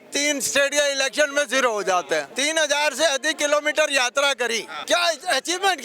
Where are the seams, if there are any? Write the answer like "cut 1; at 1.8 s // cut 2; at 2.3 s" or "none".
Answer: cut 1; at 2.3 s // cut 2; at 4.7 s